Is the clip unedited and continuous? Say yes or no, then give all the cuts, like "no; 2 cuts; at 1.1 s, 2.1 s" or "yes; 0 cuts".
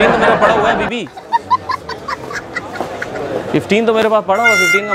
yes; 0 cuts